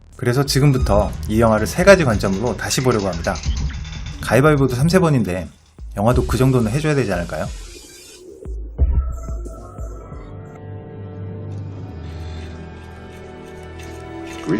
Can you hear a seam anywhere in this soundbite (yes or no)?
yes